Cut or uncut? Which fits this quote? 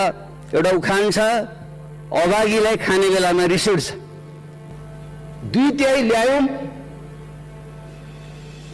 cut